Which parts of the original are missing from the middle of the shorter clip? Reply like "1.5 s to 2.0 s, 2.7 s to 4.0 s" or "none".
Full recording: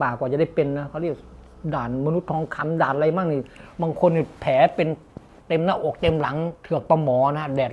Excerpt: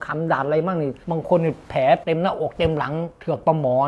3.5 s to 3.7 s, 4.7 s to 5.4 s